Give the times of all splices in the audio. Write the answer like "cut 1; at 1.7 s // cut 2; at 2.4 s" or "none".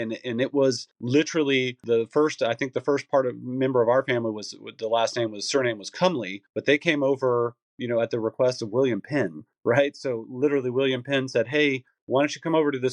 cut 1; at 1.8 s